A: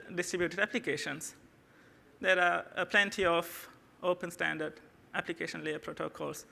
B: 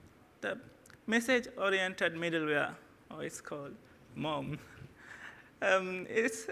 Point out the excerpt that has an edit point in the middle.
B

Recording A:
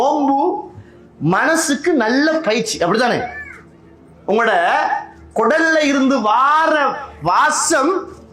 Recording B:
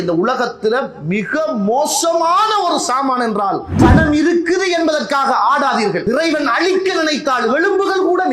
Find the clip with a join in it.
B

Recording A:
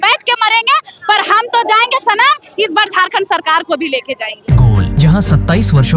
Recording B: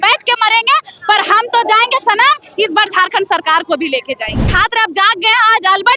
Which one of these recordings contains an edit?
B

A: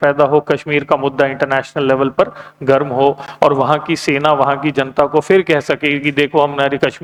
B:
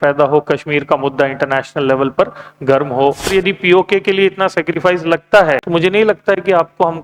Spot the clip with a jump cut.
B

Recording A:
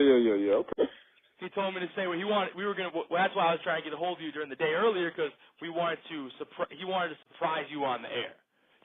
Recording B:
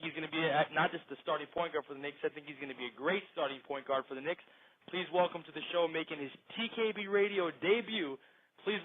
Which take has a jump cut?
B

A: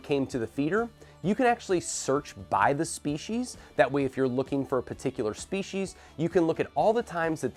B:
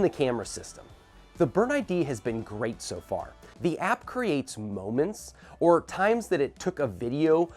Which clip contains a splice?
B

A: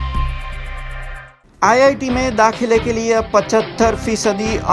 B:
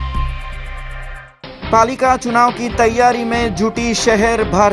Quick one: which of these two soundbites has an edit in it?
B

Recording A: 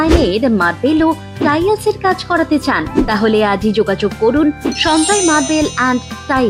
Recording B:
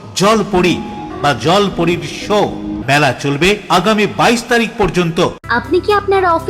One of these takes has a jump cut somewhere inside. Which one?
B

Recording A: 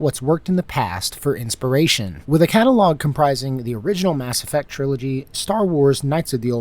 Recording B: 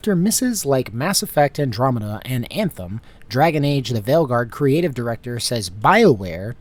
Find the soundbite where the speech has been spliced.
A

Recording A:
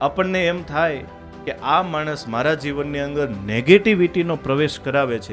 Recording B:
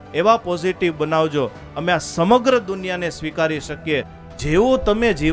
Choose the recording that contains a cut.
B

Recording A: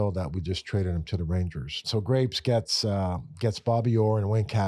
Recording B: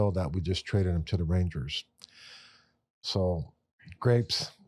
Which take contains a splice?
A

